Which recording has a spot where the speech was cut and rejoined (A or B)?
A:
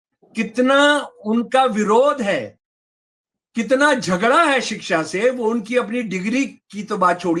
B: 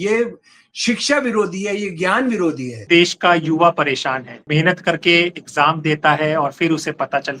B